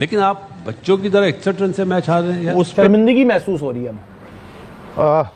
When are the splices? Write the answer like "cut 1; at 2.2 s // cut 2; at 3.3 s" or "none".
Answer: none